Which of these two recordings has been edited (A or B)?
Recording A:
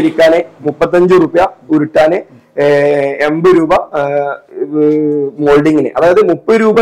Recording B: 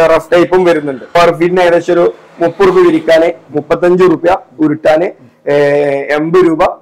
B